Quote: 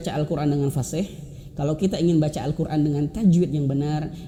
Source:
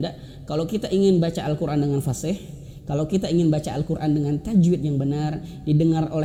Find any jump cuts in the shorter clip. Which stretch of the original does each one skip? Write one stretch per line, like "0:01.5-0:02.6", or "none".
none